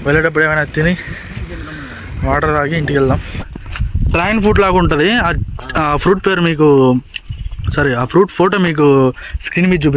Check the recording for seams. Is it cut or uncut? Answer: uncut